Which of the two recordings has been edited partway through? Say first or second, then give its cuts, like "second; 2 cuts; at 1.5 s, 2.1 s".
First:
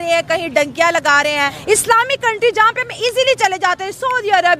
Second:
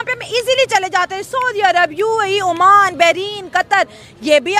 first; 1 cut; at 1.6 s